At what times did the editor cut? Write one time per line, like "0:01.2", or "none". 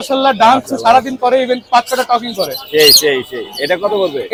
none